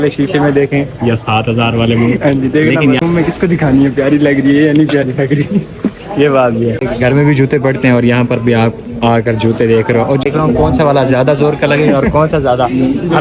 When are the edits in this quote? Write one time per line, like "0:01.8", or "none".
0:03.0
0:06.8
0:10.2

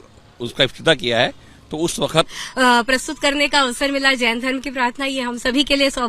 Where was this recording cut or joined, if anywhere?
0:02.4

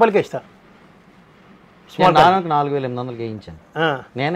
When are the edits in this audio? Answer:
none

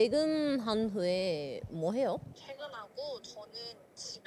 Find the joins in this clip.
none

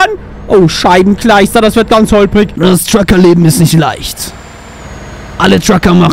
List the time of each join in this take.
0:02.5

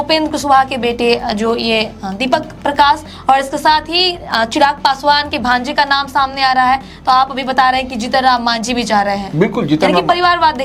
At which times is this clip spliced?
none

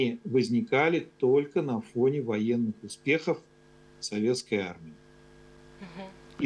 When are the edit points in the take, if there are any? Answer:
none

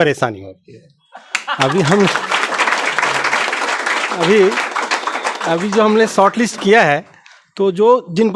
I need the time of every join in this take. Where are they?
none

